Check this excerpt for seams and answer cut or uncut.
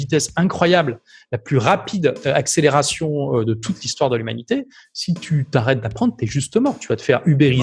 uncut